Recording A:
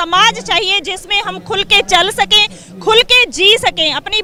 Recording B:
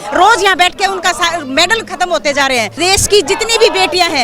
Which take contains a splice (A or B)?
B